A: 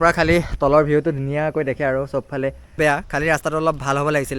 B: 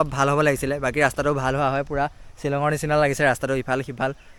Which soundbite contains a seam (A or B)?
A